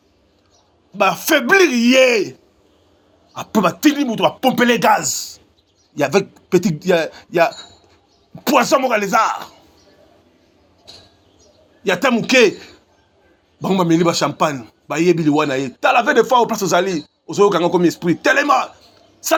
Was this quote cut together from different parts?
no; 0 cuts

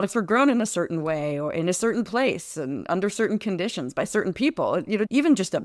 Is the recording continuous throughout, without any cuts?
yes; 0 cuts

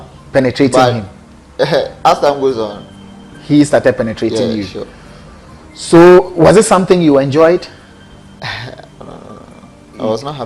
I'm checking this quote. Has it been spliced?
yes; 1 cut; at 9.1 s

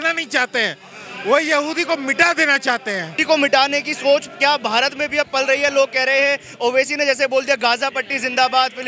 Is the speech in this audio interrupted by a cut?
no; 0 cuts

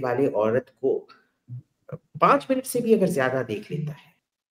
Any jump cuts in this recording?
no; 0 cuts

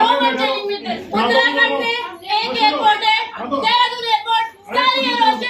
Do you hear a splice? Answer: yes; 1 cut; at 0.9 s

